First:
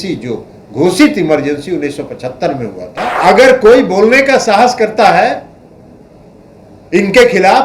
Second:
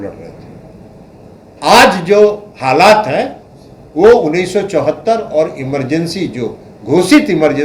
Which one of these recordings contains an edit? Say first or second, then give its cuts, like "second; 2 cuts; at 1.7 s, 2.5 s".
first; 1 cut; at 3.0 s